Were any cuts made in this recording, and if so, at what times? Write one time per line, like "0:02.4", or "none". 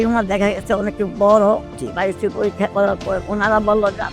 0:01.7
0:03.2